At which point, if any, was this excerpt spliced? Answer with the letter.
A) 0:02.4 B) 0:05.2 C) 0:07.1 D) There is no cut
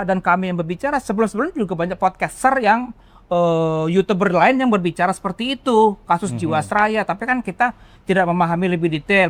D